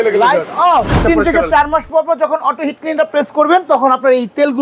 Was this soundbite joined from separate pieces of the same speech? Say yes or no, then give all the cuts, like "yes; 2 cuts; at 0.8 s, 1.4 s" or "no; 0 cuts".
yes; 1 cut; at 1.0 s